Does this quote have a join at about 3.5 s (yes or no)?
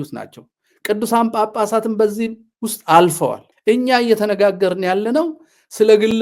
yes